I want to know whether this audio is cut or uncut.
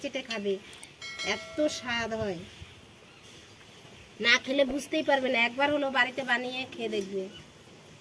uncut